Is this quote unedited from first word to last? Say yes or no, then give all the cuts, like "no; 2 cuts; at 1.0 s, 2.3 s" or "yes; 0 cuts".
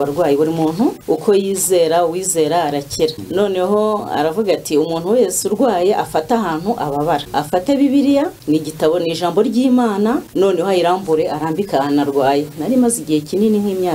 no; 5 cuts; at 1.0 s, 3.2 s, 7.3 s, 8.4 s, 10.3 s